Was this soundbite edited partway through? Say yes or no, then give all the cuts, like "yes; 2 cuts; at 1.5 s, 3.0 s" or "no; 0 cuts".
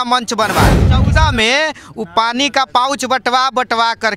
yes; 1 cut; at 0.9 s